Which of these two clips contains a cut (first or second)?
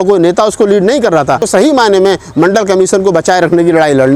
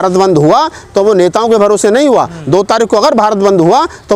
first